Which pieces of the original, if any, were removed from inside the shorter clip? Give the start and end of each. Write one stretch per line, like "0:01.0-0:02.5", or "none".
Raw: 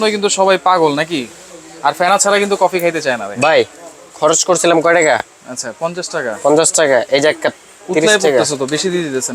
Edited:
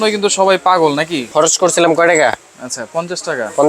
0:01.2-0:04.1